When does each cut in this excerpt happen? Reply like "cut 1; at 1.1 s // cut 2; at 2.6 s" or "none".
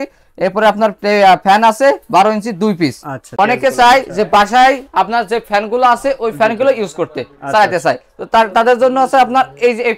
cut 1; at 3.3 s